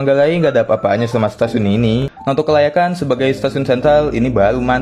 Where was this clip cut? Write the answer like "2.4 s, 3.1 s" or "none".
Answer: 2.3 s